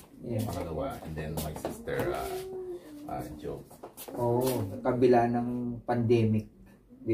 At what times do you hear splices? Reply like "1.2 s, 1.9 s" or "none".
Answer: 4.8 s